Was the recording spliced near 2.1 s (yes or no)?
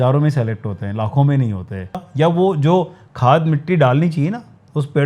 yes